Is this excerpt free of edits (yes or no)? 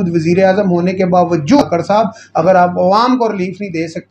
no